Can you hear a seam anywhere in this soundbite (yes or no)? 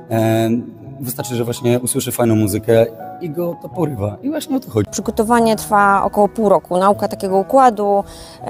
yes